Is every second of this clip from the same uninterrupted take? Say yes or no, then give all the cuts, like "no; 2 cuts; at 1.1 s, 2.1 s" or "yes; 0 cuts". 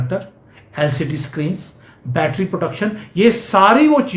yes; 0 cuts